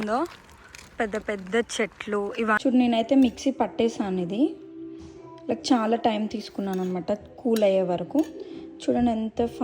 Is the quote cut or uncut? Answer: cut